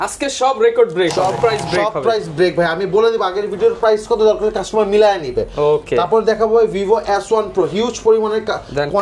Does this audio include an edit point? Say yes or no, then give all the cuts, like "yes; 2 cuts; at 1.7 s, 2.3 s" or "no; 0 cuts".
yes; 1 cut; at 1.3 s